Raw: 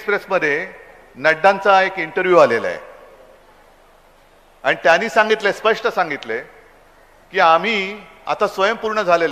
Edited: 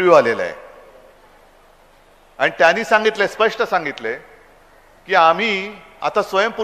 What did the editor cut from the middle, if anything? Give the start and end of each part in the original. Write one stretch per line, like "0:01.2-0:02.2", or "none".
none